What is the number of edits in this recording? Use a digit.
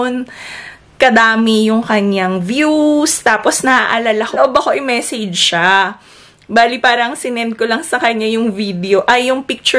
1